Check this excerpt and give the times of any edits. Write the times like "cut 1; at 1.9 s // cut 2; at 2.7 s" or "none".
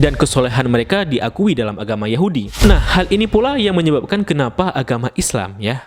cut 1; at 2.5 s